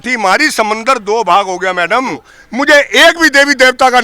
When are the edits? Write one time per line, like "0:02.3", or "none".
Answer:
0:02.4